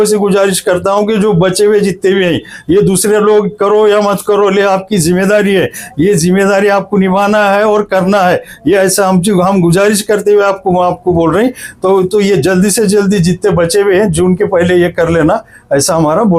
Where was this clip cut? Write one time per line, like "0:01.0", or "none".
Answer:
none